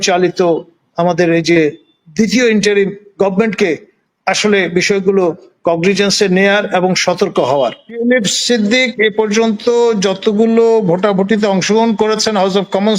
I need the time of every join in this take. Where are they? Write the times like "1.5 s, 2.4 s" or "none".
7.9 s